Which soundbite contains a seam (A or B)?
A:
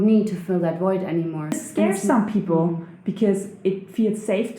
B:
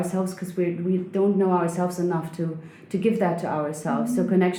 A